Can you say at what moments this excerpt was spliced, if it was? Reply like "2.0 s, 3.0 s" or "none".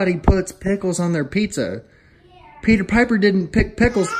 none